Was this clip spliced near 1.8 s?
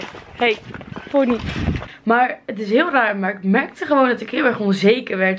yes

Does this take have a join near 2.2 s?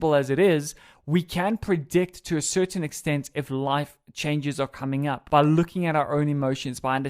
no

